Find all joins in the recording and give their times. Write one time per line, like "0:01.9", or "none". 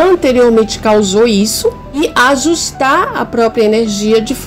0:02.0